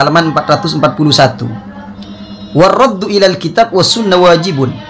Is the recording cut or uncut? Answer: uncut